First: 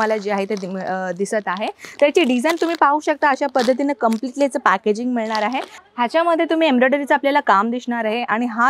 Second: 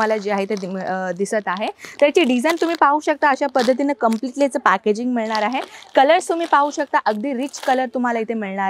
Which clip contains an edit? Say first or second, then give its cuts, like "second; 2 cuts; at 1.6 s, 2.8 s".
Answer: first; 1 cut; at 5.8 s